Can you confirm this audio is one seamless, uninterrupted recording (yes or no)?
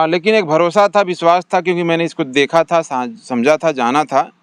yes